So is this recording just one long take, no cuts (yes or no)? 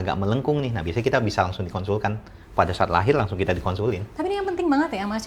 yes